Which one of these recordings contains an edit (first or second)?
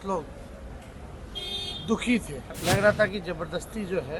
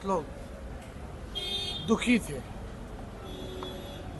first